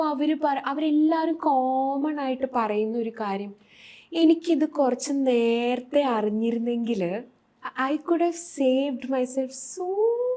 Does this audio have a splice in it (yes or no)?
no